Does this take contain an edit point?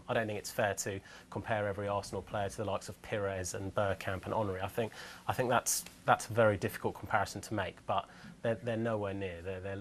no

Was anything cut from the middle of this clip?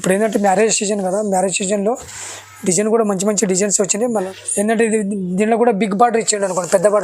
yes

